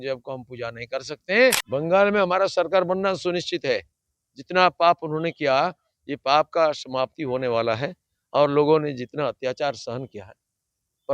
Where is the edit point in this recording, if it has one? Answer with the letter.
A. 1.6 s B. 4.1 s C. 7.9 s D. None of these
A